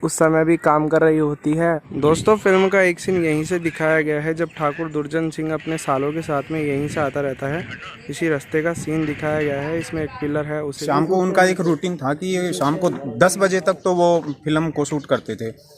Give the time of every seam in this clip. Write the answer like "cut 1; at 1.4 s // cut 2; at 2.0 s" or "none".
cut 1; at 1.8 s // cut 2; at 10.8 s